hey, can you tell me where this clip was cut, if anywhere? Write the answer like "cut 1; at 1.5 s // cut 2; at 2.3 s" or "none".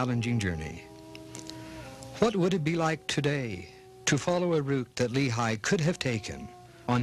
cut 1; at 5.6 s